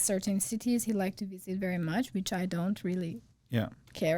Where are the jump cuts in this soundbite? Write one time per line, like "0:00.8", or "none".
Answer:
none